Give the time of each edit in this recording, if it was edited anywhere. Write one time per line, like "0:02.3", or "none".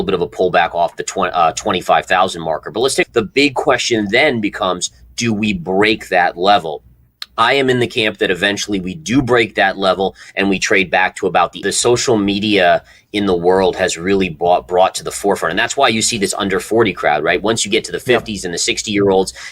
0:03.0
0:11.6